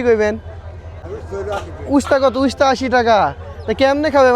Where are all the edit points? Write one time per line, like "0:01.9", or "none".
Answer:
0:01.0